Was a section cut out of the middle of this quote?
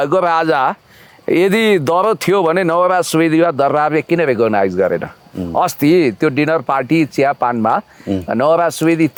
no; 0 cuts

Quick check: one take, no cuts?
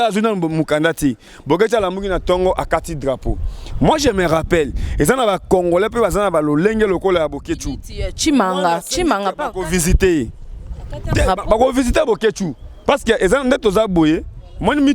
yes; 0 cuts

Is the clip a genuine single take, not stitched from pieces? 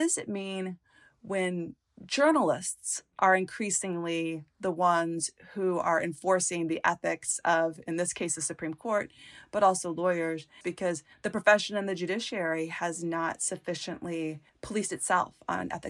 no; 2 cuts; at 10.7 s, 14.5 s

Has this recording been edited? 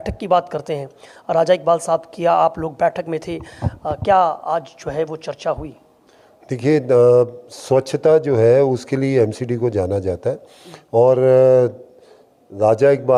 no; 0 cuts

